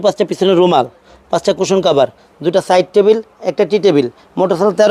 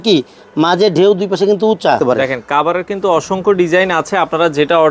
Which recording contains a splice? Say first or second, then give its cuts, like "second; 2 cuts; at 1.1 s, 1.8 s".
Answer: second; 1 cut; at 2.1 s